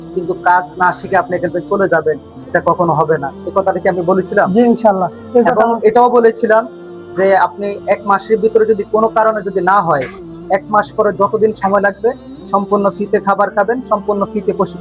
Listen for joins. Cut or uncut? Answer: uncut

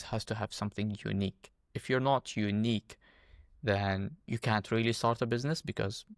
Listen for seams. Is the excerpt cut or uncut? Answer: uncut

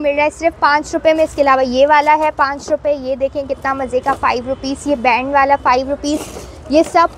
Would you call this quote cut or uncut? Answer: uncut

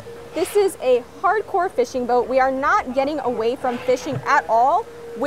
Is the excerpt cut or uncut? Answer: uncut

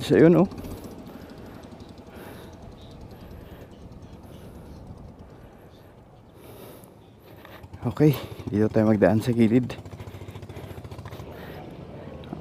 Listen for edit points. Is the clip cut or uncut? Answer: cut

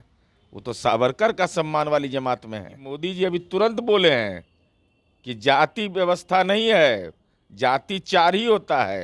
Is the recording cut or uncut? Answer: cut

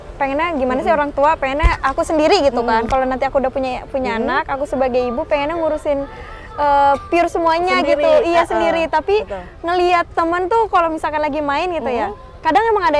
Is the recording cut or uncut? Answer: uncut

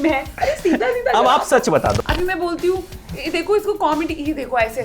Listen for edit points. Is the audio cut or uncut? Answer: cut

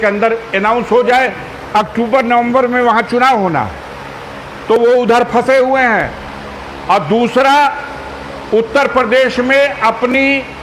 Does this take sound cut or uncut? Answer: uncut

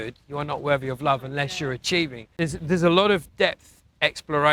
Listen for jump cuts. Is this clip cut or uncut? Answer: cut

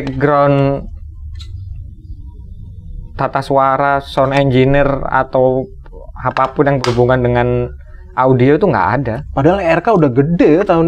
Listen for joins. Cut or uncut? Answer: uncut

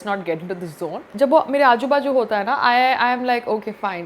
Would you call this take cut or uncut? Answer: cut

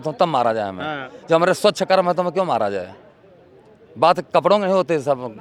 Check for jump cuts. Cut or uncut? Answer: uncut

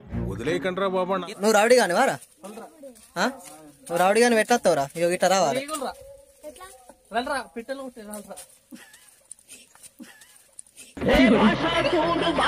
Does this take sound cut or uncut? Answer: cut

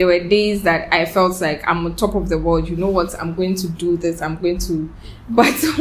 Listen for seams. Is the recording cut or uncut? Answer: uncut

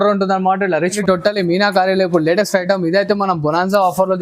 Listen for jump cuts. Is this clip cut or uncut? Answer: cut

